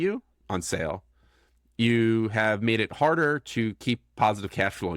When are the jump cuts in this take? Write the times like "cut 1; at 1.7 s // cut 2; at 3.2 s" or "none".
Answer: none